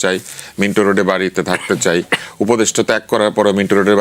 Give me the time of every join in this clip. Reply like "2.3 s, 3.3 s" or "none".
none